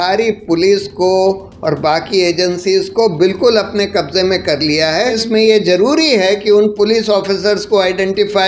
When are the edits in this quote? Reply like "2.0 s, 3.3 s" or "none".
5.2 s